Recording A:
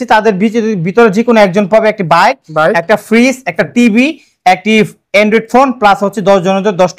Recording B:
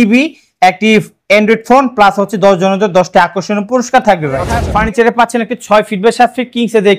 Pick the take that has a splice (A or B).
B